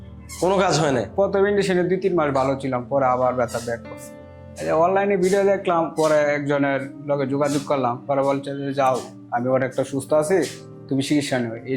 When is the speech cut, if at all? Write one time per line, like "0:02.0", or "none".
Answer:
0:04.2